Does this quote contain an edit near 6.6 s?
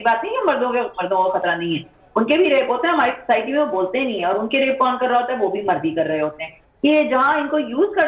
yes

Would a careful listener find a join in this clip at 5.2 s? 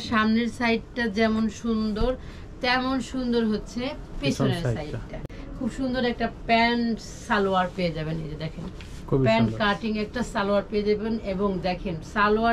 yes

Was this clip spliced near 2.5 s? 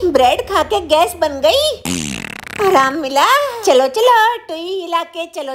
no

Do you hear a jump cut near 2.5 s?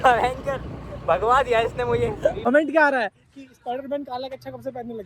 yes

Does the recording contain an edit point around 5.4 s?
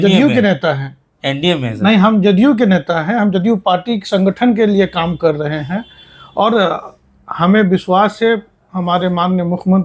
no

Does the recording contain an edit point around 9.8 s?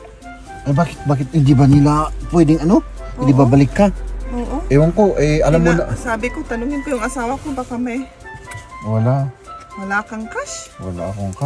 no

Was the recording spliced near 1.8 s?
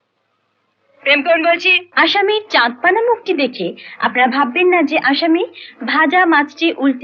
yes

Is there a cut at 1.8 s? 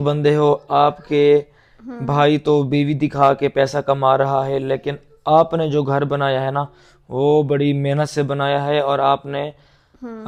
no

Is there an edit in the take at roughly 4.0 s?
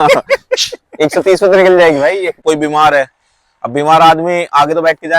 no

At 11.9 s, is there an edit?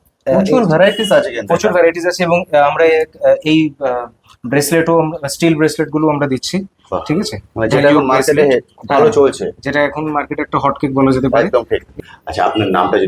yes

